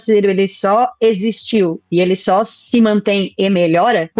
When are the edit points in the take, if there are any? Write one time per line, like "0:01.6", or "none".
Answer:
none